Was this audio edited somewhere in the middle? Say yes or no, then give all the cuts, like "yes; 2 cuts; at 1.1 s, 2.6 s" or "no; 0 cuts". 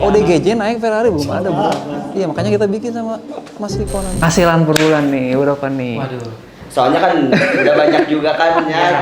yes; 1 cut; at 4.2 s